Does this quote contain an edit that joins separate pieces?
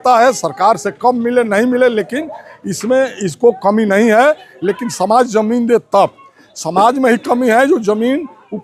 no; 0 cuts

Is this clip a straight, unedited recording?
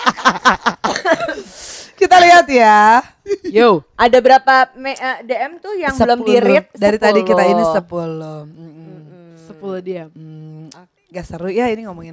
yes; 0 cuts

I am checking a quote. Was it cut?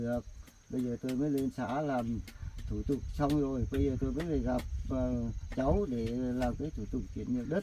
no; 0 cuts

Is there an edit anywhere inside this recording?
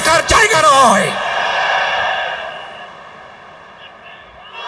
no; 0 cuts

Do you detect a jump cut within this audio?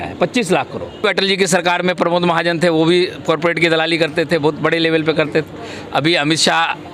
yes; 1 cut; at 1.0 s

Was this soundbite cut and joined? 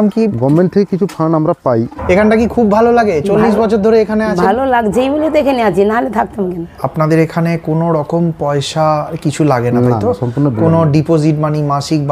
yes; 2 cuts; at 2.0 s, 6.7 s

